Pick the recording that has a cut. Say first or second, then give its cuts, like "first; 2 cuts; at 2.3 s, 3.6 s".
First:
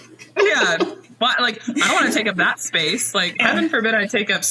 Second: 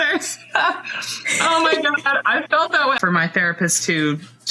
second; 1 cut; at 3.0 s